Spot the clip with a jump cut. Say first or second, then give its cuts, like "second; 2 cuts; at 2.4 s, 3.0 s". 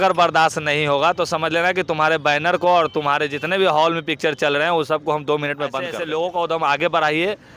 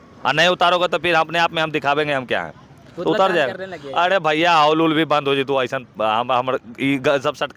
first; 1 cut; at 5.9 s